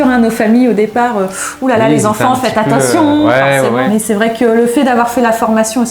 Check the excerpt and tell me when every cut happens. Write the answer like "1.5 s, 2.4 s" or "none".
3.9 s